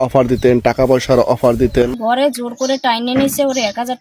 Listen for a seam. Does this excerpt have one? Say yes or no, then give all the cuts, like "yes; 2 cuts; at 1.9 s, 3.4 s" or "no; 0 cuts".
yes; 1 cut; at 1.9 s